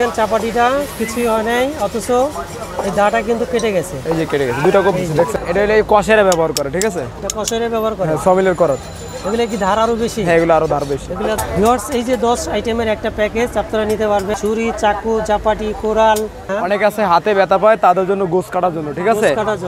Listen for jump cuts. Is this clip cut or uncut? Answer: cut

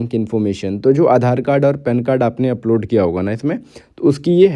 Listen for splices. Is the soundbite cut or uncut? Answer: uncut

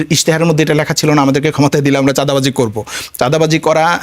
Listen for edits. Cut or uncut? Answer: uncut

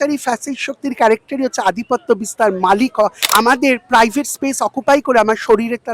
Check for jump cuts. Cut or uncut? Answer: cut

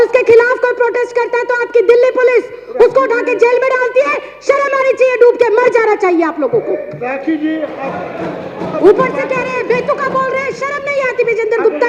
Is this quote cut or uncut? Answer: uncut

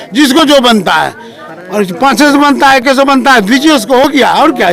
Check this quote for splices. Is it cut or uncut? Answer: uncut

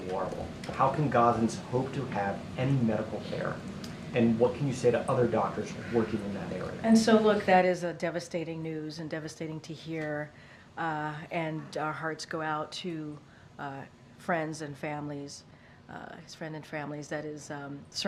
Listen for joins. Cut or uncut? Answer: uncut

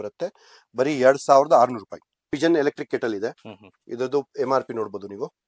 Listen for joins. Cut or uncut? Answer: cut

